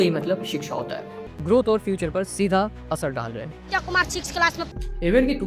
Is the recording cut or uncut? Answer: cut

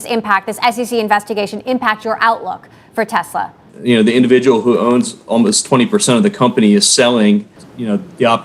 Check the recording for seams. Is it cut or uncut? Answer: cut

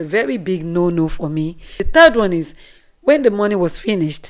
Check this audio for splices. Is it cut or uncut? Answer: cut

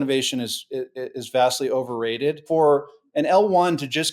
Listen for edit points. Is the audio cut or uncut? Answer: cut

